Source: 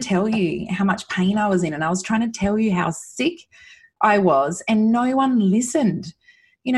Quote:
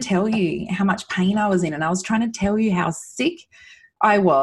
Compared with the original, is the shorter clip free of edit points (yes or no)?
yes